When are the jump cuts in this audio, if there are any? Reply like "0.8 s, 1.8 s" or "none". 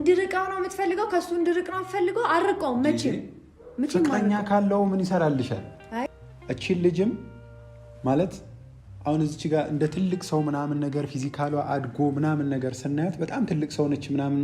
6.1 s

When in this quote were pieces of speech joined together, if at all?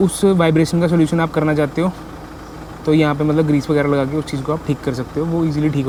none

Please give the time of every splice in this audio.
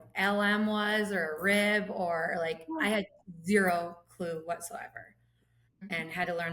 5.4 s

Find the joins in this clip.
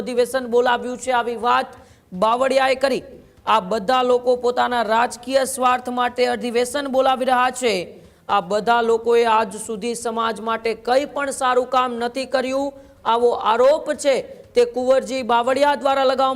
none

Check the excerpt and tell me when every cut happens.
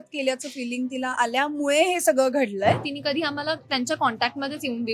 2.9 s

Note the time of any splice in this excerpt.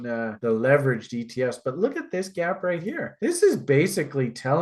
none

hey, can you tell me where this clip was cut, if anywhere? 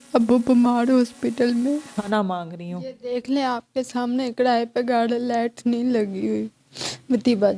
2.1 s

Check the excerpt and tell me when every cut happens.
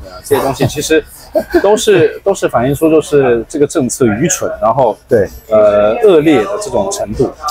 none

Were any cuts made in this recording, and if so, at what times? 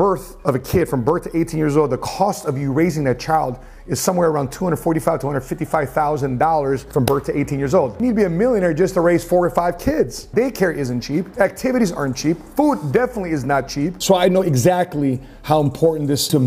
7.9 s, 10.3 s, 14.0 s

